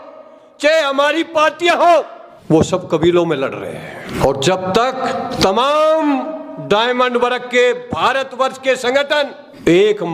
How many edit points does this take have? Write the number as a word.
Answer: zero